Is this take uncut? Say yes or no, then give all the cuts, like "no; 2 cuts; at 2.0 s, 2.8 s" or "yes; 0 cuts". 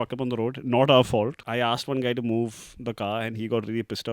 no; 1 cut; at 1.4 s